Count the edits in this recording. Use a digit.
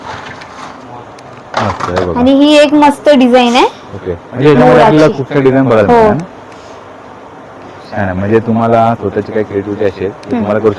0